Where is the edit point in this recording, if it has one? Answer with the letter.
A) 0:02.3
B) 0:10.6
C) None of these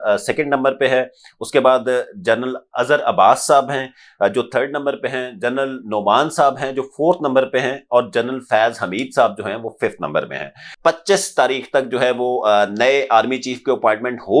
B